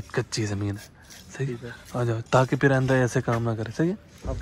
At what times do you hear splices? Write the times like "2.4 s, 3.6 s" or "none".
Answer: none